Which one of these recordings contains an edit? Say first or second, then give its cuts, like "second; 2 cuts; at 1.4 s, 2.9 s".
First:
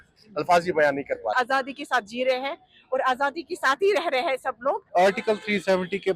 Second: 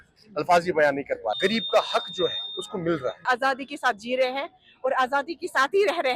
first; 2 cuts; at 1.3 s, 4.8 s